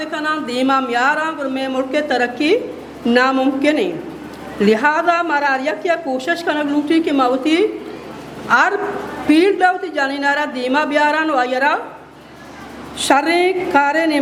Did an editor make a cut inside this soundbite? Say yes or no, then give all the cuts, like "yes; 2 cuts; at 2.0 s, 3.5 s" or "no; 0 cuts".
no; 0 cuts